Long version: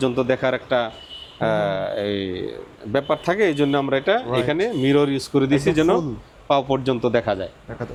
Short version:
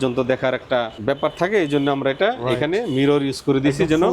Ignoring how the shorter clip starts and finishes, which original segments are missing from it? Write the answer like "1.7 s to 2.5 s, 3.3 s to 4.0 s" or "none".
0.9 s to 2.8 s